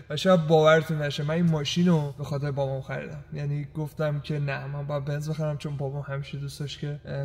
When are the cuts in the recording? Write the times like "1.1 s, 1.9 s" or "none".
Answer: none